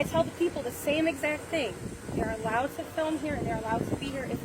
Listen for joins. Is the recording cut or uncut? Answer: uncut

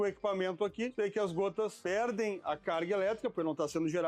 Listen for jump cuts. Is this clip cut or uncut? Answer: cut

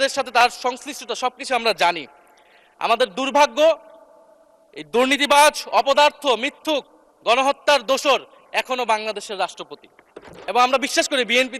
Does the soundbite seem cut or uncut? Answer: cut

